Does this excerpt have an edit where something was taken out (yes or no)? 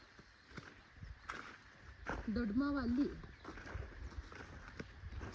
no